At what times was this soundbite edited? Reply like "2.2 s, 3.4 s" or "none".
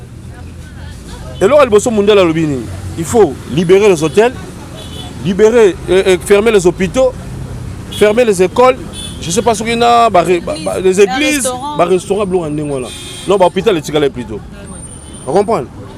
none